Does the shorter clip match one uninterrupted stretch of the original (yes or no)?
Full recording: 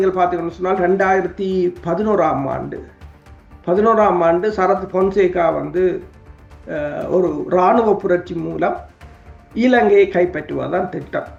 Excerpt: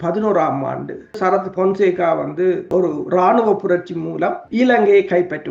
no